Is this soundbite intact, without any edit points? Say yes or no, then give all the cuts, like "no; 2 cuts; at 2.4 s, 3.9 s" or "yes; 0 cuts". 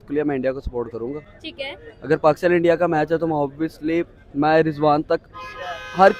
yes; 0 cuts